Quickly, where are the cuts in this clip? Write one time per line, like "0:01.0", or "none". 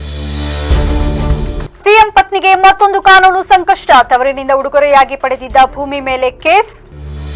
0:01.6